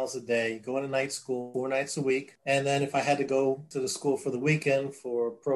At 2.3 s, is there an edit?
yes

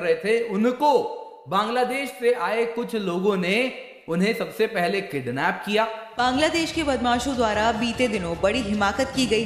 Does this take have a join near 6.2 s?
yes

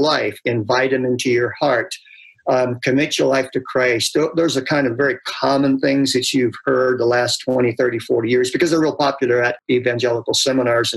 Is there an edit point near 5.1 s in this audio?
no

